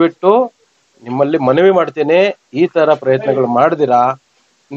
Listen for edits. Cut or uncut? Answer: uncut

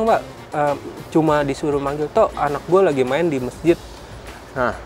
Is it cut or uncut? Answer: uncut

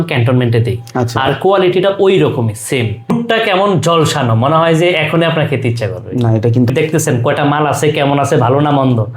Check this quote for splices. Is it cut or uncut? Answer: cut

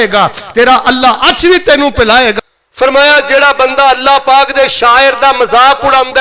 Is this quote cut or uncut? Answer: cut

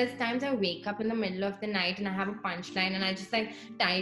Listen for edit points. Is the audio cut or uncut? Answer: uncut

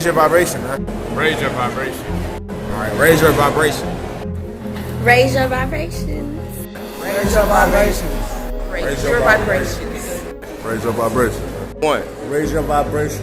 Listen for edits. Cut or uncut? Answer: uncut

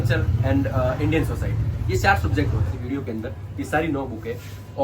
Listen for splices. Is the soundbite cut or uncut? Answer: cut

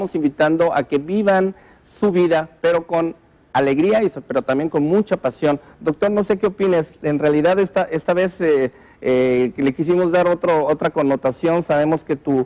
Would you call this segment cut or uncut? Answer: cut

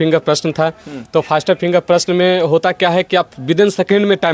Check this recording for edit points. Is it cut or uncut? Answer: uncut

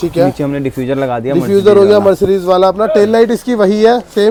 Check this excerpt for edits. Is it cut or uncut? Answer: uncut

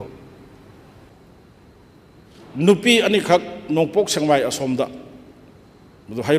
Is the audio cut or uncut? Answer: cut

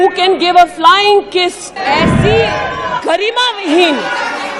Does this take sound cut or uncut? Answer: cut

